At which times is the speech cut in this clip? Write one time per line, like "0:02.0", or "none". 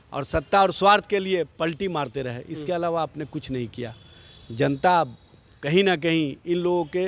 none